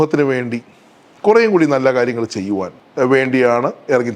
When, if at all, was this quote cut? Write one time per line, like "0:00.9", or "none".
0:02.8

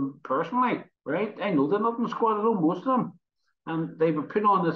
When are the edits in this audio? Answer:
0:00.9

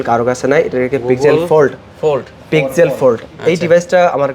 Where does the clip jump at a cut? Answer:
none

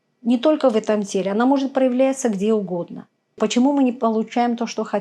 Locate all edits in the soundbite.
0:03.4

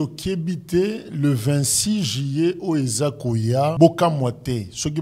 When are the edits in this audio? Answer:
0:03.7

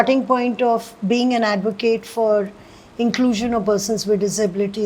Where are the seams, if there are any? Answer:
none

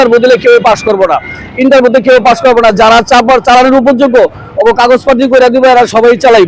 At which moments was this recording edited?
none

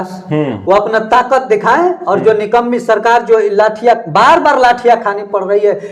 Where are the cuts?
none

